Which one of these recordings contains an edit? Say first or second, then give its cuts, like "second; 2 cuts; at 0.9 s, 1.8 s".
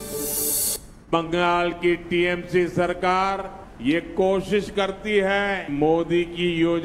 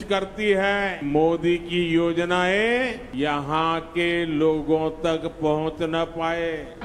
first; 1 cut; at 0.9 s